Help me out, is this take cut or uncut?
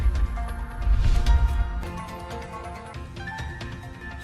uncut